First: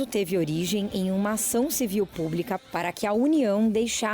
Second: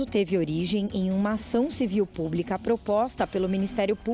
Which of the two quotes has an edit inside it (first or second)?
first